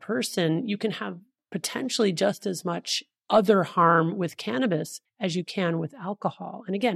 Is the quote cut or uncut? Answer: cut